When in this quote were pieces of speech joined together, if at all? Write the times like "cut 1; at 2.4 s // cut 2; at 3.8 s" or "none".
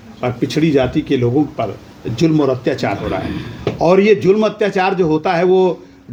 none